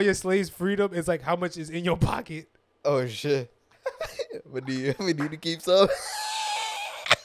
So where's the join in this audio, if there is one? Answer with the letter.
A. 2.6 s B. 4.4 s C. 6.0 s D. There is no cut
D